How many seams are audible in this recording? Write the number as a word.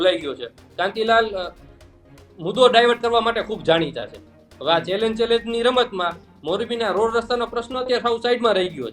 zero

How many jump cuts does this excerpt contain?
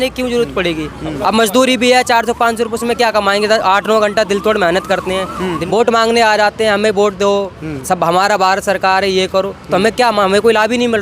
one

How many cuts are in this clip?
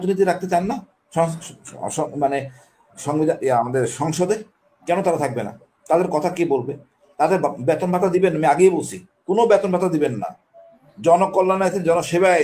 zero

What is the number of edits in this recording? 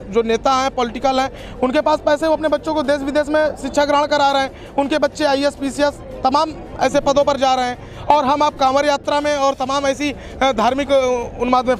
zero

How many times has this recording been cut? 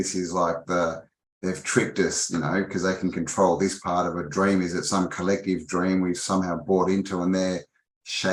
zero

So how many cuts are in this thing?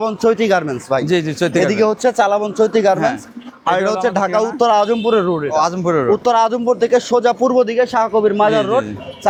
zero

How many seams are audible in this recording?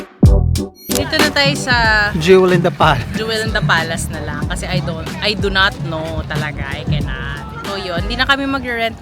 one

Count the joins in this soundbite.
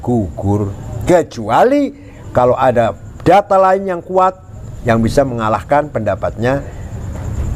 zero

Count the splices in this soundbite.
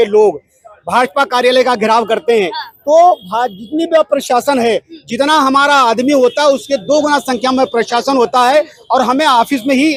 zero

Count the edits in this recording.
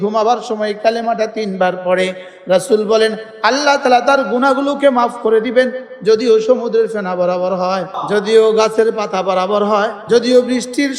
two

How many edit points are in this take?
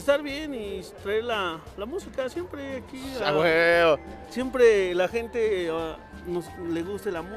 zero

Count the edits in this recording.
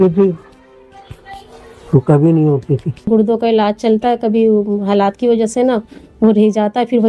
one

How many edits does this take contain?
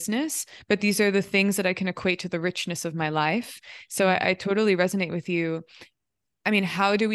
zero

